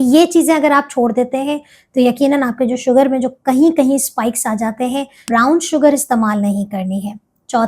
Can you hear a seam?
yes; 1 cut; at 5.2 s

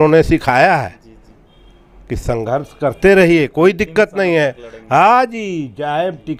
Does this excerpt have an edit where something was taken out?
no; 0 cuts

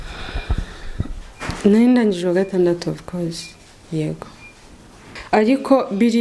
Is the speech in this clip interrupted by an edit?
yes; 1 cut; at 5.2 s

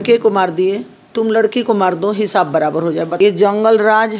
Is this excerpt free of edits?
no; 1 cut; at 3.1 s

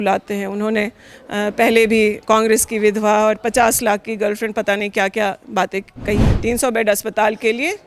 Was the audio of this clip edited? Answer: yes; 1 cut; at 6.3 s

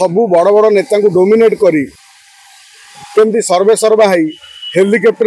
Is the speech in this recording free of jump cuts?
yes; 0 cuts

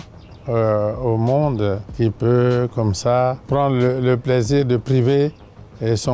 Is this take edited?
yes; 2 cuts; at 1.9 s, 3.4 s

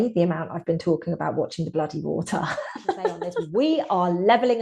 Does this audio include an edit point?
yes; 1 cut; at 3.3 s

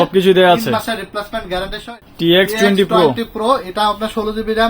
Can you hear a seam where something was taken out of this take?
yes; 1 cut; at 1.9 s

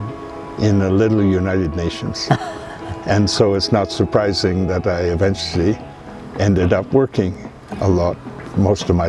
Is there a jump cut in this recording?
no; 0 cuts

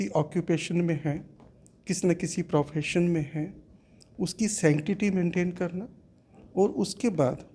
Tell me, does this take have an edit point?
no; 0 cuts

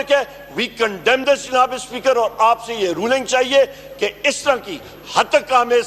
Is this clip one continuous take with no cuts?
yes; 0 cuts

